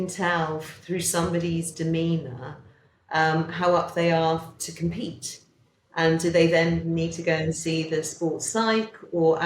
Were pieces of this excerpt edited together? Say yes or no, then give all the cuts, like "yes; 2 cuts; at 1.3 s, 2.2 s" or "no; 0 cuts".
no; 0 cuts